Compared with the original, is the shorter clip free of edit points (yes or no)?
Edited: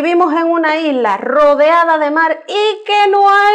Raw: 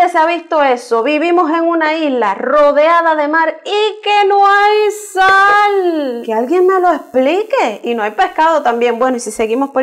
yes